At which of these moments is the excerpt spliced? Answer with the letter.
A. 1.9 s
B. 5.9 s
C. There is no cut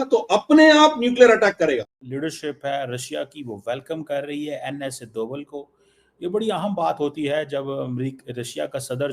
A